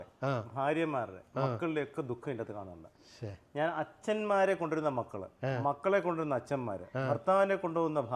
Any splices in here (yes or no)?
no